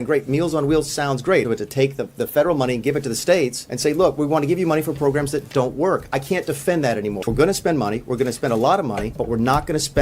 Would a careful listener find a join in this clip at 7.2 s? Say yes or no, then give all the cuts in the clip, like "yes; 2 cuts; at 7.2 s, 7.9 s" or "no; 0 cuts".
yes; 4 cuts; at 1.4 s, 3.7 s, 7.2 s, 9.1 s